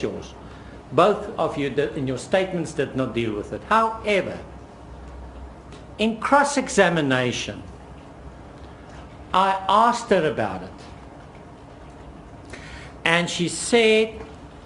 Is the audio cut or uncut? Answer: cut